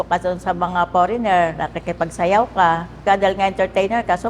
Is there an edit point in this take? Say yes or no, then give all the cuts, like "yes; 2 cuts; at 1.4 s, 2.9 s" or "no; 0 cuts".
yes; 1 cut; at 3.0 s